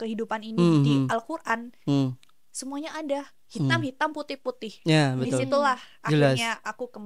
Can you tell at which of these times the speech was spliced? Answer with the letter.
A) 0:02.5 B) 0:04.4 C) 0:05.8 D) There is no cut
D